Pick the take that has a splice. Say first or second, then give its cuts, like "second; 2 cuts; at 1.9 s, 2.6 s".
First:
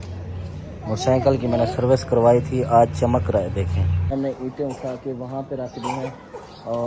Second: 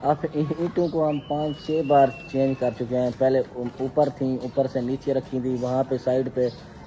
first; 1 cut; at 4.1 s